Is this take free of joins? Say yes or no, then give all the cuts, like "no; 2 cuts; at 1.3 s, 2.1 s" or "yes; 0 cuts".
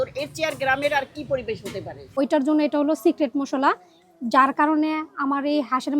no; 1 cut; at 2.0 s